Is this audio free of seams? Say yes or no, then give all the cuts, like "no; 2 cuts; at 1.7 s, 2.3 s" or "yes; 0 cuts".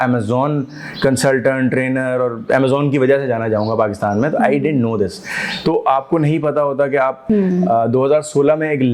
no; 1 cut; at 7.2 s